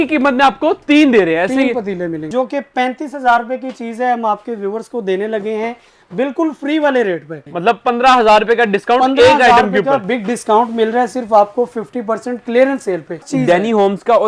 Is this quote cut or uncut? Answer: cut